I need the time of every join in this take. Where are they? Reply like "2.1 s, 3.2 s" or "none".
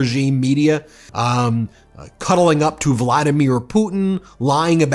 1.0 s